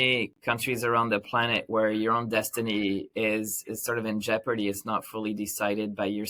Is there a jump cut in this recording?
no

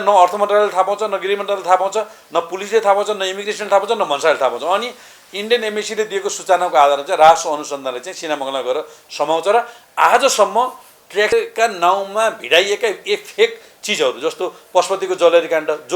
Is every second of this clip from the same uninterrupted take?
no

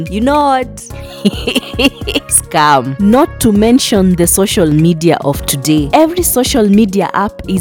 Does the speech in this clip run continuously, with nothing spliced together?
yes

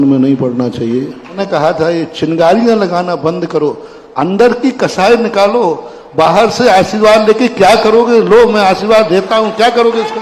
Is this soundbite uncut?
no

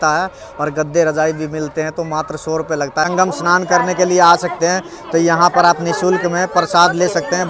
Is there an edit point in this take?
yes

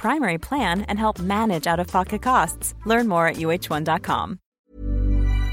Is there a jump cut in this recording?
yes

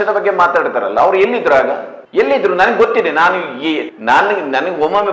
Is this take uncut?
no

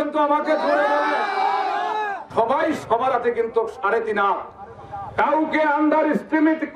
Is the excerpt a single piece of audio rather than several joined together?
no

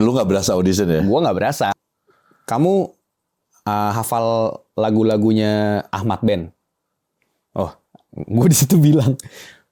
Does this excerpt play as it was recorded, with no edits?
no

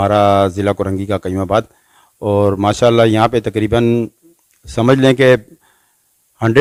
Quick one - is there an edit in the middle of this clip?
no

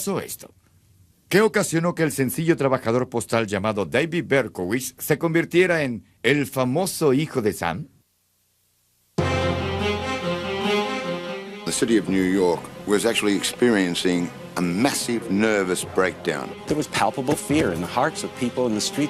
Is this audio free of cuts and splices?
no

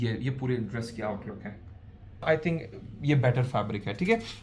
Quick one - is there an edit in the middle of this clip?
yes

